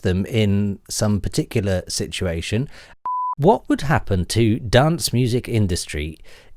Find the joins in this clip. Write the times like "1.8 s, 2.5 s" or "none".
2.9 s